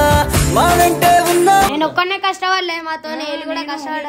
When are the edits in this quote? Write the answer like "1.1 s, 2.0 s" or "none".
1.7 s

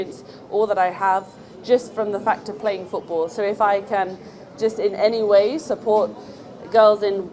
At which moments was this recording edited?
none

